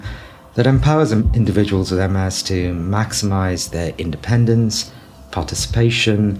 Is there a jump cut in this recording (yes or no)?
no